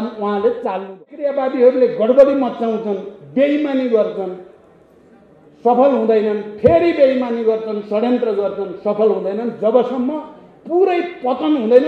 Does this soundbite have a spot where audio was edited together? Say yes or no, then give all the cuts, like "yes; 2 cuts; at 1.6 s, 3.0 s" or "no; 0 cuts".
yes; 1 cut; at 1.2 s